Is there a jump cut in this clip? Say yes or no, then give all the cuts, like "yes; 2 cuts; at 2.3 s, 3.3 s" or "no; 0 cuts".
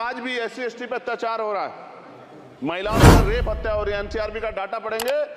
no; 0 cuts